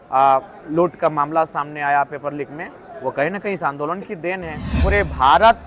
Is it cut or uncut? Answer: cut